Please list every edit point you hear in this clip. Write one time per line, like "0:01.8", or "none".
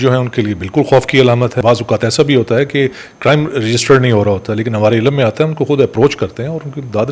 0:01.6